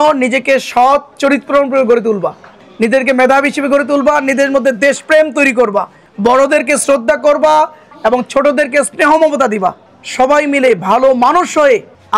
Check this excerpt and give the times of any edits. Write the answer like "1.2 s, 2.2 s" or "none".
7.8 s